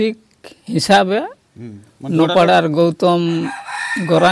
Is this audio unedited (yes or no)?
yes